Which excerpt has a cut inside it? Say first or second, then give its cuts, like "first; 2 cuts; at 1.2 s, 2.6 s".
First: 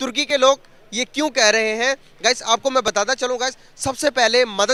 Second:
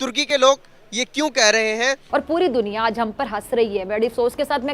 second; 1 cut; at 2.0 s